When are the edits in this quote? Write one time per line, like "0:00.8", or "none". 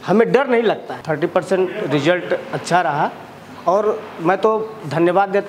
0:00.9